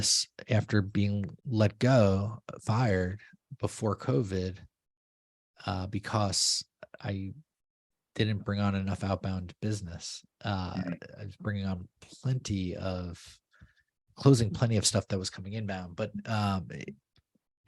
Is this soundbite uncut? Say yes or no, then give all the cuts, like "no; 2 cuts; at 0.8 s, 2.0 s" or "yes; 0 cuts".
no; 1 cut; at 1.4 s